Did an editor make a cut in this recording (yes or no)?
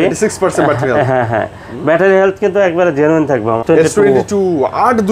yes